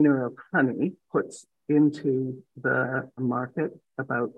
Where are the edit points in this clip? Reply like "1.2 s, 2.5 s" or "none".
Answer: 1.0 s